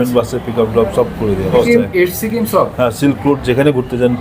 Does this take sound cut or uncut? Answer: cut